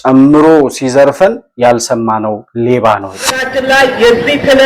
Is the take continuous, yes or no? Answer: no